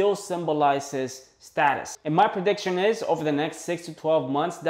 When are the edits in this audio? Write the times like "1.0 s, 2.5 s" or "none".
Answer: 1.9 s